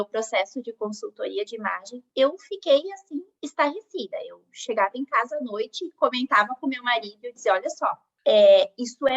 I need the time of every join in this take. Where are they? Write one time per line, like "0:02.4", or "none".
0:08.1